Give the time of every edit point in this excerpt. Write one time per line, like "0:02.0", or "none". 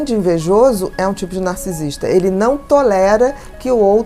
none